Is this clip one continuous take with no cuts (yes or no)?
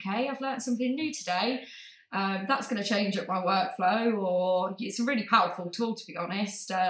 yes